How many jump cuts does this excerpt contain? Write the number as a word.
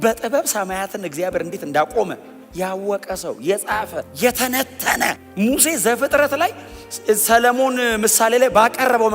two